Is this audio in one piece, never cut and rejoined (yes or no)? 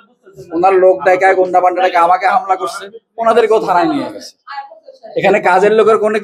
yes